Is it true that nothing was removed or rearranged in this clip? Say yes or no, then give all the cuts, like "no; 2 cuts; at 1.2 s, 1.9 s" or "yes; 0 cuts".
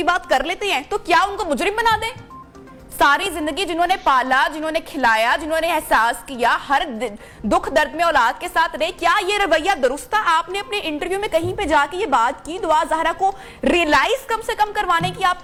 yes; 0 cuts